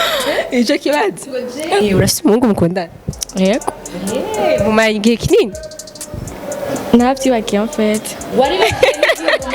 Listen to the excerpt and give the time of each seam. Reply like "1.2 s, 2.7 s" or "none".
1.8 s